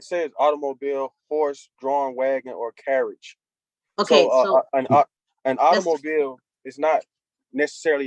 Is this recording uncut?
yes; 0 cuts

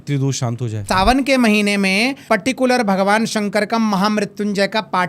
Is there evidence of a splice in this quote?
yes; 2 cuts; at 0.8 s, 2.2 s

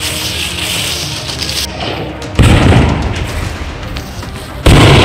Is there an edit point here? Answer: no; 0 cuts

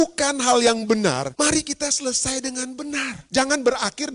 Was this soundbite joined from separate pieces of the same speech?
yes; 2 cuts; at 1.3 s, 3.2 s

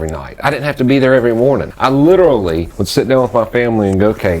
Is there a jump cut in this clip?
yes; 2 cuts; at 1.7 s, 2.7 s

